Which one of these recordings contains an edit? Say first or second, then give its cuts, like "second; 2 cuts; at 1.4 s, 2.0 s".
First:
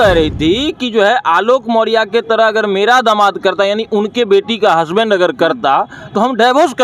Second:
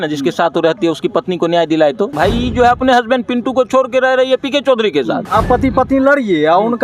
second; 2 cuts; at 2.1 s, 5.2 s